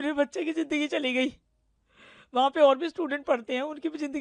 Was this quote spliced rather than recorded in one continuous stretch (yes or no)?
no